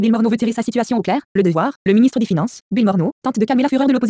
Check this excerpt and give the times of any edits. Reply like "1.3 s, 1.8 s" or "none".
1.1 s, 2.1 s